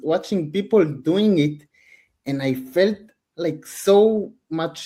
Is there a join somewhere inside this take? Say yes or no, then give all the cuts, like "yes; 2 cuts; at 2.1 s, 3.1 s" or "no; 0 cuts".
no; 0 cuts